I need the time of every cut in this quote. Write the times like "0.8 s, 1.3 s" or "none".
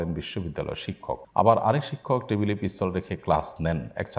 1.2 s